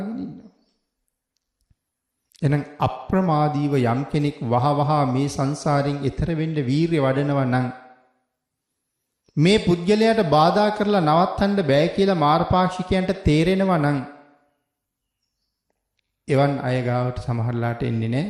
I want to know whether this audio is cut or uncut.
uncut